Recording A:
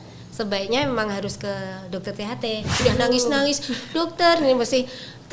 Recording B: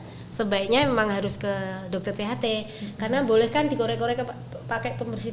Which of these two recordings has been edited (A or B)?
A